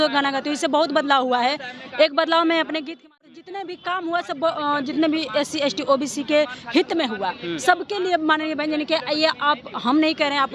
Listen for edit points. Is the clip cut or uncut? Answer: cut